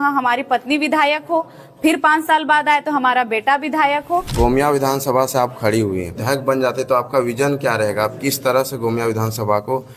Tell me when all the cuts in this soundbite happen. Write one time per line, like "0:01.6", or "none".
0:04.3
0:06.2

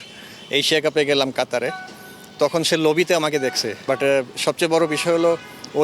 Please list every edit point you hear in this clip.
0:03.7

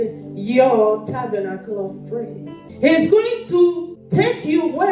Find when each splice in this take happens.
0:02.6
0:03.9

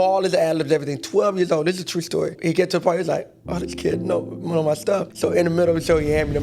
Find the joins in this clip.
0:02.4
0:05.1

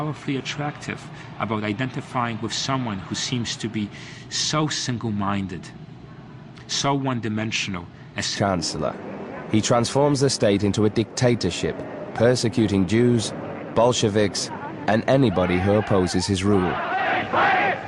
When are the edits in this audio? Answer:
none

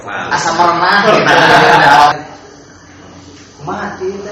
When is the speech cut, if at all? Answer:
0:02.1

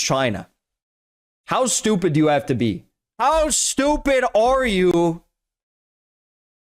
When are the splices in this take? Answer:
0:02.8

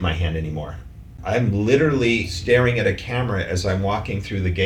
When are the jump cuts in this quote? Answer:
0:01.1
0:02.3

